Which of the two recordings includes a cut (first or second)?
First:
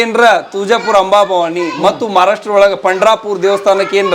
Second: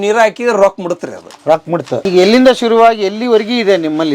second